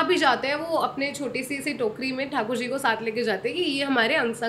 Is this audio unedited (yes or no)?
yes